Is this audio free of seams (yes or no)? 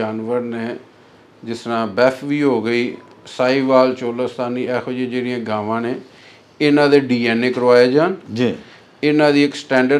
yes